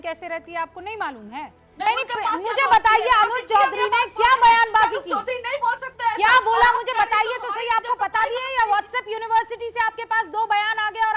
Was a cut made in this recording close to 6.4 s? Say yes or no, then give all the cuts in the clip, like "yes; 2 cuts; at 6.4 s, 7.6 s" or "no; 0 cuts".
no; 1 cut; at 1.9 s